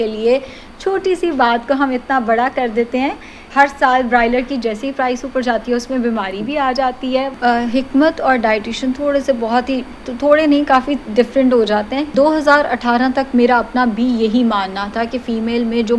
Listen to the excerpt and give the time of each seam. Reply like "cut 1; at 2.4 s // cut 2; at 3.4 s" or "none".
cut 1; at 3.5 s // cut 2; at 7.3 s // cut 3; at 12.1 s